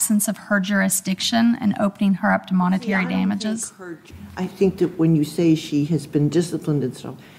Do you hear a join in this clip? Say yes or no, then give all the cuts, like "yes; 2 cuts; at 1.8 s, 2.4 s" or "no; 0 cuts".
yes; 1 cut; at 4.0 s